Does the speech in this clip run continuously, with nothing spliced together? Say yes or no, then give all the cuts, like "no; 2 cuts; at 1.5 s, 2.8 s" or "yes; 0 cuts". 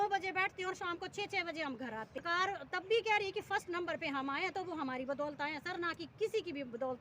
no; 1 cut; at 2.2 s